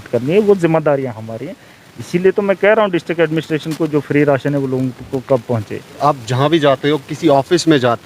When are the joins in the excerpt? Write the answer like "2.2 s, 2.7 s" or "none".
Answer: 5.9 s